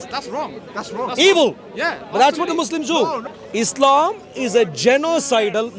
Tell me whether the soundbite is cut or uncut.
cut